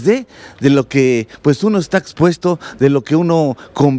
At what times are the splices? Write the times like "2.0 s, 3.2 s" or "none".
none